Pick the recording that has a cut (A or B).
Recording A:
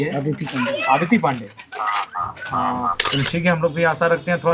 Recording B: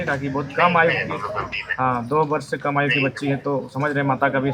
A